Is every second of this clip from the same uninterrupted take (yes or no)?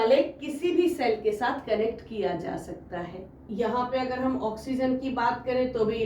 no